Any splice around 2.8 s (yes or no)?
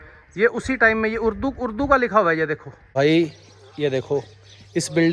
yes